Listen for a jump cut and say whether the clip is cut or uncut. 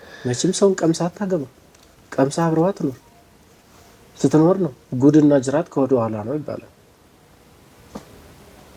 uncut